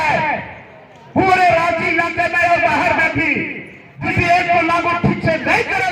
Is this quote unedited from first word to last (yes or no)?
no